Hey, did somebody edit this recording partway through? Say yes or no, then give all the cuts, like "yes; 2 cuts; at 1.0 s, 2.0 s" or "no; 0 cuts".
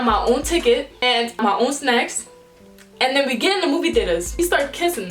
yes; 2 cuts; at 1.4 s, 4.4 s